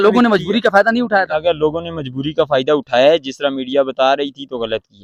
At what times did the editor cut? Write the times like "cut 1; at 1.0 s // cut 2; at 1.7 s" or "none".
none